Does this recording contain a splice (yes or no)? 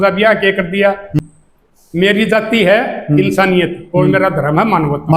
yes